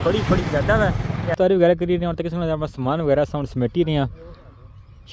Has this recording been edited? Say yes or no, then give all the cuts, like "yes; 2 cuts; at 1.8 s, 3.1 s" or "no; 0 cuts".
yes; 1 cut; at 1.3 s